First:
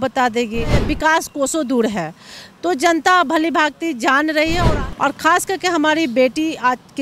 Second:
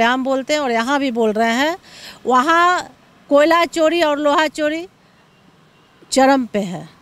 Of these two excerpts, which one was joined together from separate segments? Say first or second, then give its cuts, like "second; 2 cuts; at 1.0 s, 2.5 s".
first; 2 cuts; at 0.8 s, 4.7 s